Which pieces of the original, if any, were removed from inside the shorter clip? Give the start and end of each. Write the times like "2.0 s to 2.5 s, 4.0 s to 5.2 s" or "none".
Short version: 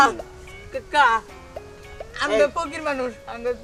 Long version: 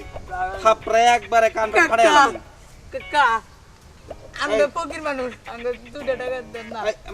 none